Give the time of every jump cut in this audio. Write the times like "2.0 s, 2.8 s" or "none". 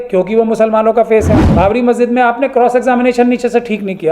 1.4 s